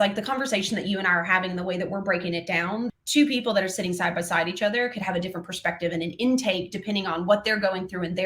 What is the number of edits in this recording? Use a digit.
1